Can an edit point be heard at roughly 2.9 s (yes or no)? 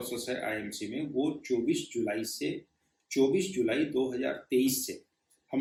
no